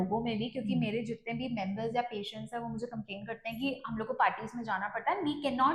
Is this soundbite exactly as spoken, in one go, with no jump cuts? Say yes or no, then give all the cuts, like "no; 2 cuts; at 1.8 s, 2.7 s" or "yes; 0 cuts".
yes; 0 cuts